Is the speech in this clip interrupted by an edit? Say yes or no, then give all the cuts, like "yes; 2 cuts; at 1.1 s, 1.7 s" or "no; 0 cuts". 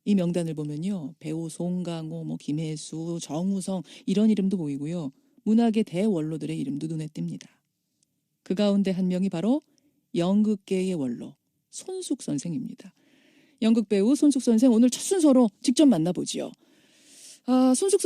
yes; 1 cut; at 4.3 s